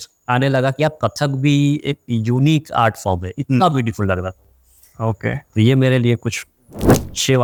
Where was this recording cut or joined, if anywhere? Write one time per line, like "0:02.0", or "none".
none